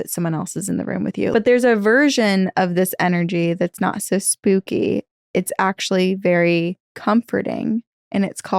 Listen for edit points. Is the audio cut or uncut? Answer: cut